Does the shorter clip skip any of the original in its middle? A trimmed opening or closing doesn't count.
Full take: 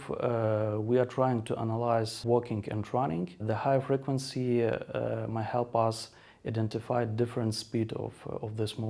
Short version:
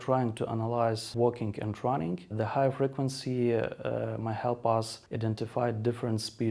yes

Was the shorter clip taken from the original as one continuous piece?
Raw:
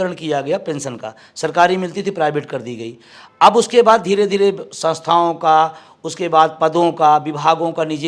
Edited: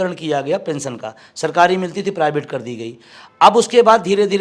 yes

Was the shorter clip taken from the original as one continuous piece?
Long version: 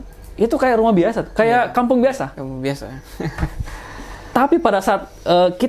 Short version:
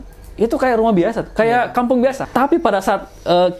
no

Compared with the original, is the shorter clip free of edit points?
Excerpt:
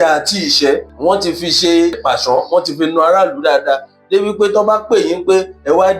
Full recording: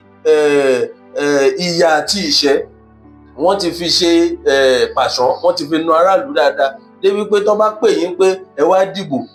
no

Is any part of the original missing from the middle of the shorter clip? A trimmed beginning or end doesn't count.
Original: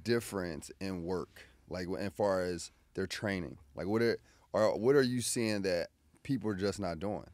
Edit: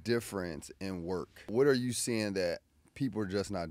yes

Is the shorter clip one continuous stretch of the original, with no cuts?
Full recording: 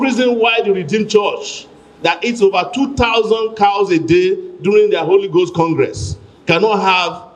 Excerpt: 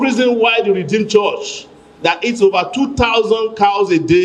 yes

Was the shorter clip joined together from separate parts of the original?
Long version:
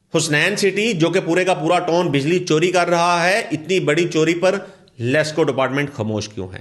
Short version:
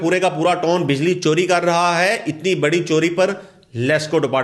no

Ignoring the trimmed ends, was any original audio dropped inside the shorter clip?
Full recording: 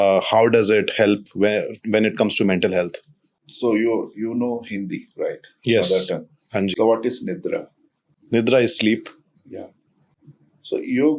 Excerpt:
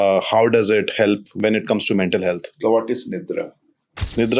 yes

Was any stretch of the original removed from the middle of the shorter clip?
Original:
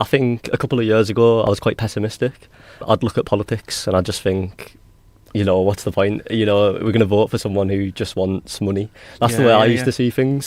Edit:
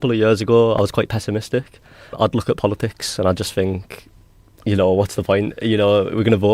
no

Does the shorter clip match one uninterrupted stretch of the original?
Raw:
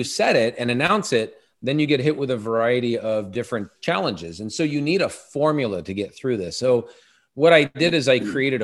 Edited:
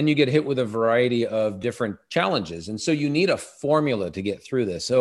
yes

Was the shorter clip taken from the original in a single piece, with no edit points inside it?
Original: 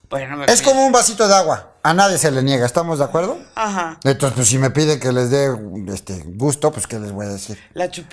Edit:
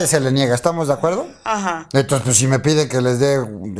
yes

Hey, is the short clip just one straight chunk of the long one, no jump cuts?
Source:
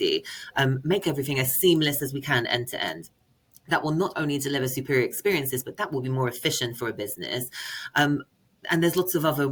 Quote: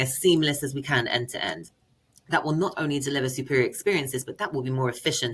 yes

